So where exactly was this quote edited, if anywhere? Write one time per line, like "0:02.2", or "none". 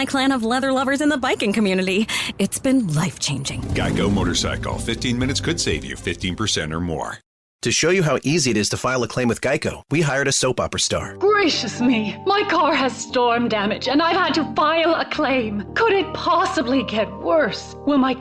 none